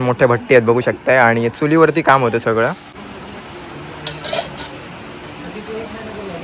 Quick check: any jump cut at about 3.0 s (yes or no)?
yes